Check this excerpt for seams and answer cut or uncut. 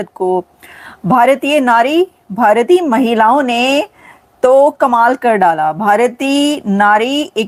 uncut